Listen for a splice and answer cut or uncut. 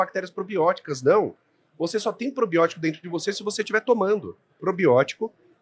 cut